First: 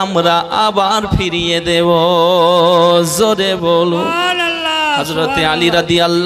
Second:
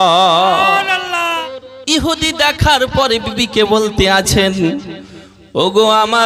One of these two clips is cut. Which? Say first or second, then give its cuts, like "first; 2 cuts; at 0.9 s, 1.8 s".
second; 1 cut; at 1.4 s